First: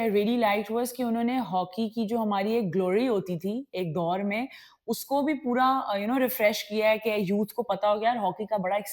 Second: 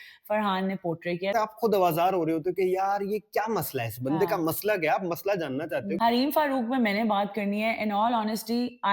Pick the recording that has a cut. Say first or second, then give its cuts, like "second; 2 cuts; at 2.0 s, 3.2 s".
second; 2 cuts; at 1.3 s, 6.0 s